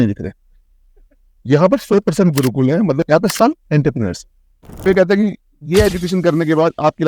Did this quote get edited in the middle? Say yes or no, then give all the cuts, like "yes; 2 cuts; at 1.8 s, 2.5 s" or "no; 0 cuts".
yes; 2 cuts; at 3.0 s, 4.8 s